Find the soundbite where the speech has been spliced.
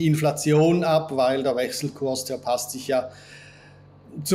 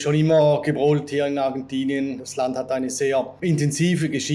second; 2 cuts; at 2.2 s, 3.4 s

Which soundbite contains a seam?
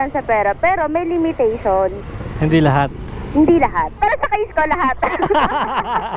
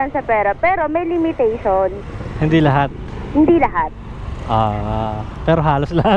first; 1 cut; at 3.9 s

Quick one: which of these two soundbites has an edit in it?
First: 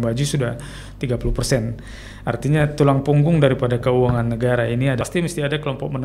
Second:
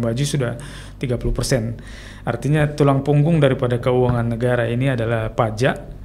first; 1 cut; at 5.0 s

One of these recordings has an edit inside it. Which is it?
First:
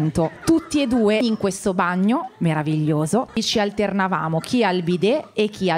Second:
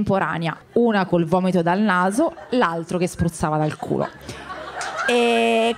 first; 2 cuts; at 1.2 s, 3.4 s

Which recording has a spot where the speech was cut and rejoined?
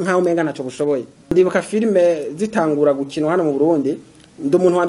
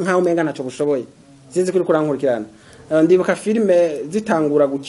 first; 1 cut; at 1.3 s

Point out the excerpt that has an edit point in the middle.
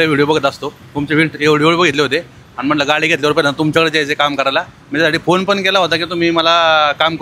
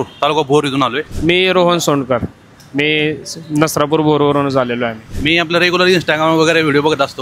second; 2 cuts; at 1.1 s, 5.0 s

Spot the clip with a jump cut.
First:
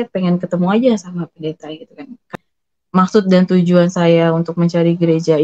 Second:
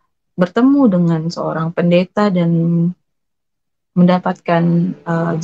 first; 1 cut; at 2.3 s

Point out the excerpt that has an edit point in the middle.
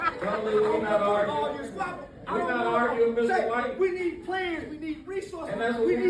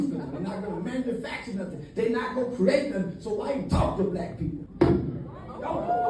second; 1 cut; at 4.6 s

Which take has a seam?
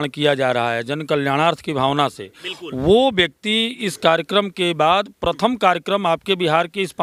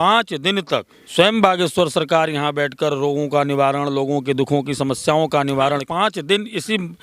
second; 2 cuts; at 1.0 s, 5.8 s

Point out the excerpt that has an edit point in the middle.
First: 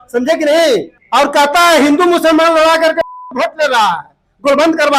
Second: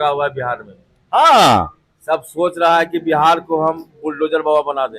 first; 1 cut; at 1.0 s

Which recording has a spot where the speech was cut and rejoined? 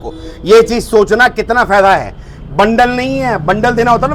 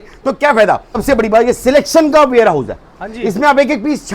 second; 1 cut; at 0.9 s

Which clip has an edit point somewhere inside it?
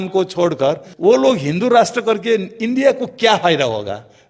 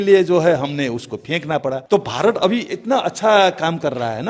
second; 1 cut; at 1.8 s

